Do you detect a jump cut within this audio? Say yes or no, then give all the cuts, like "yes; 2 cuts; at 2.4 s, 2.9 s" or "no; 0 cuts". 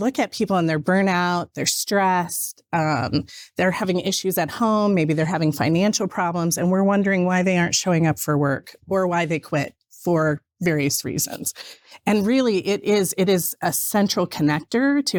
no; 0 cuts